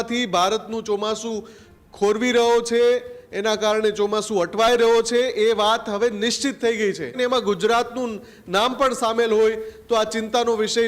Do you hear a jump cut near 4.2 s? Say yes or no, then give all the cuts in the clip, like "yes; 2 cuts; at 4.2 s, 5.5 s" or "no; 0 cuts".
no; 1 cut; at 7.2 s